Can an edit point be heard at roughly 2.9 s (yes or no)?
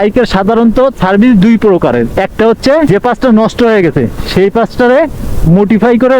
yes